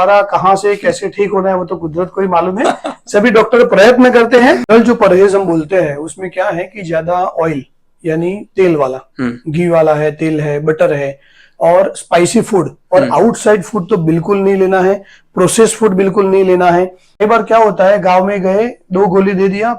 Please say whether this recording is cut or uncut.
cut